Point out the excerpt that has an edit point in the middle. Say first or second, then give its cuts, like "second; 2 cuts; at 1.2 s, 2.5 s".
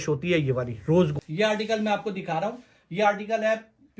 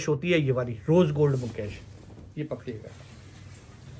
first; 1 cut; at 1.1 s